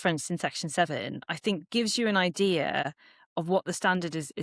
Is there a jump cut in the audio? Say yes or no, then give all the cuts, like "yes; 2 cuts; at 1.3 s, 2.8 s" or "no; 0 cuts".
no; 0 cuts